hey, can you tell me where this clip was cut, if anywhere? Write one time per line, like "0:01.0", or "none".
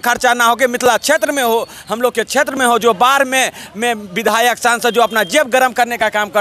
none